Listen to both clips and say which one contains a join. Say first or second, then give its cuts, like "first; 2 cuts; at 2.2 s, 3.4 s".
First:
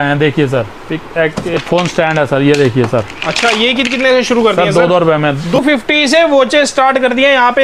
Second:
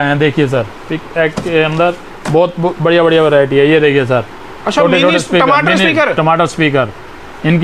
first; 2 cuts; at 1.5 s, 5.6 s